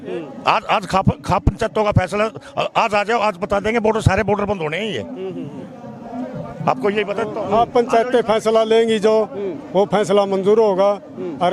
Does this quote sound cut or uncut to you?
uncut